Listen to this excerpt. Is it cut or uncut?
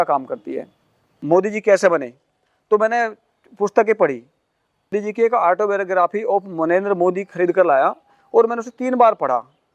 cut